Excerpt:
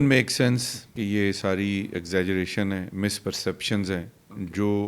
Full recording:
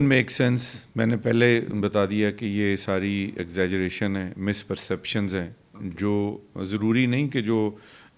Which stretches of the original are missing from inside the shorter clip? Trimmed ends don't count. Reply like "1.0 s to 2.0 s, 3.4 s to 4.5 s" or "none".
0.9 s to 2.4 s